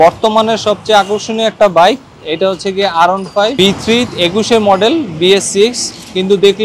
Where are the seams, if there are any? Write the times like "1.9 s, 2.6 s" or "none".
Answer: 3.5 s